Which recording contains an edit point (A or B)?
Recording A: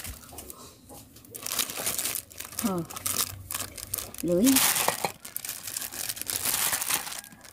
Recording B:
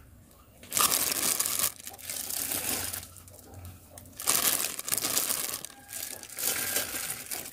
A